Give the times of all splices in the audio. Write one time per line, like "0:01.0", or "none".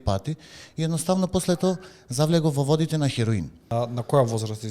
0:03.6

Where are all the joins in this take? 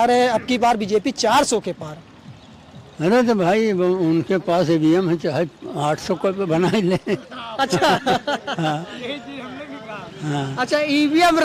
none

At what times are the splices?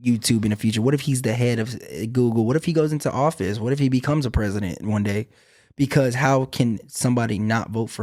none

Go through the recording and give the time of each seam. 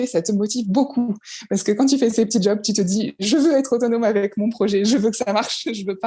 none

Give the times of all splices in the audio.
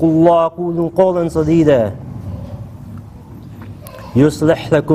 0:01.6

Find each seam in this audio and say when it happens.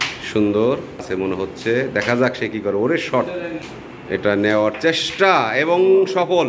0:01.0
0:03.7

